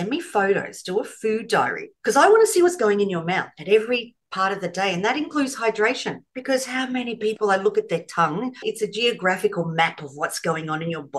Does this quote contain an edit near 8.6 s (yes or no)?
yes